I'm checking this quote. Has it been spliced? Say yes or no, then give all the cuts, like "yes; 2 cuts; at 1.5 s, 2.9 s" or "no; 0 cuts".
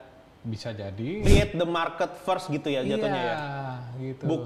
yes; 1 cut; at 1.3 s